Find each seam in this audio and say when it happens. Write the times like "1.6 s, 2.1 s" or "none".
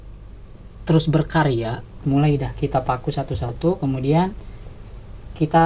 2.0 s